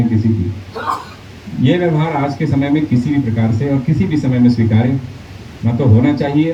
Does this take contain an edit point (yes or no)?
no